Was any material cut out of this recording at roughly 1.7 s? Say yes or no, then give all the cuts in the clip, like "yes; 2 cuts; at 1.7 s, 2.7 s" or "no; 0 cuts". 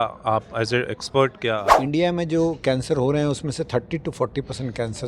yes; 1 cut; at 1.7 s